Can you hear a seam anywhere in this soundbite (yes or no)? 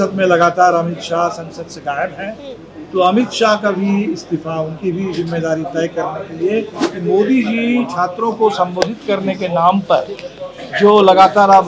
yes